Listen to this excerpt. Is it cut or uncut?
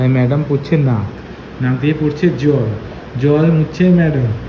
uncut